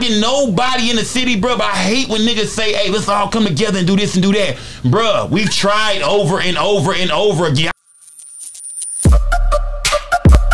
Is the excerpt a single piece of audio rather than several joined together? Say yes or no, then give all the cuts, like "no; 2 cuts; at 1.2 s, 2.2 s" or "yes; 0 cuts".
no; 1 cut; at 7.8 s